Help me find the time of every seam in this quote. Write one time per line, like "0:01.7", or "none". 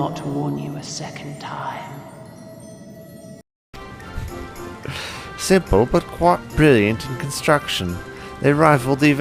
0:03.6